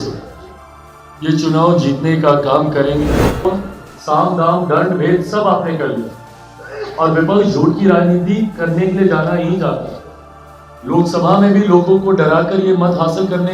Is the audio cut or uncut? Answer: cut